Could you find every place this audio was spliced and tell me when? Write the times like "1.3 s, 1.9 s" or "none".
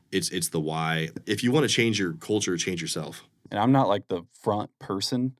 1.1 s, 3.4 s